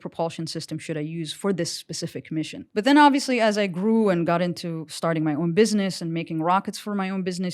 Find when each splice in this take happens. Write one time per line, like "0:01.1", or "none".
0:02.6

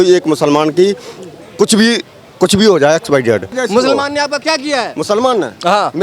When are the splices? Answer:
0:03.5

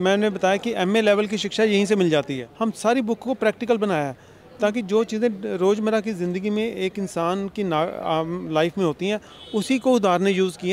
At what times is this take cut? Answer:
0:02.4

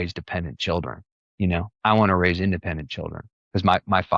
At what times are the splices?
none

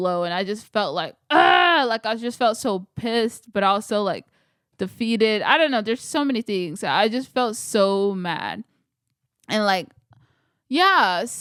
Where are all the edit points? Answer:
none

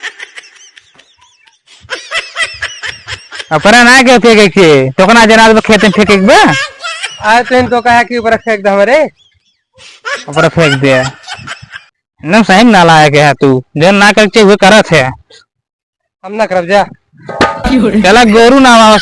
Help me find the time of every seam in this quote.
0:03.5

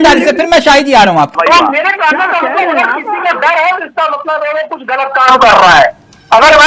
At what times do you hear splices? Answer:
0:01.3

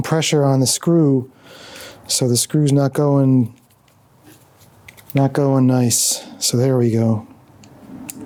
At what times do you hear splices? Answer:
none

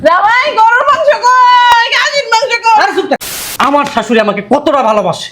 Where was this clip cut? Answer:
0:03.3

